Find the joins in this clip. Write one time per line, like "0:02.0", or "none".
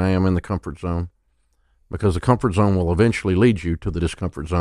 none